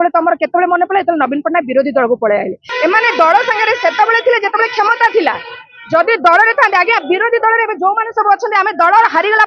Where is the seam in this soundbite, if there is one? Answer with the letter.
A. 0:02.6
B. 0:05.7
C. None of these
A